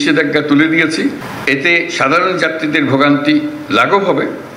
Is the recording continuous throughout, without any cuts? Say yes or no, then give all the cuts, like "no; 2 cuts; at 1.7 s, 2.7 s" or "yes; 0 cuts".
no; 1 cut; at 1.3 s